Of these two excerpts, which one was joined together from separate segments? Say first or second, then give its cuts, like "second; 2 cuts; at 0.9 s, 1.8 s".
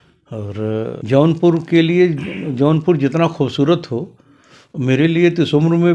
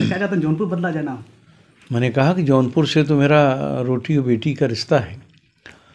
first; 1 cut; at 1.0 s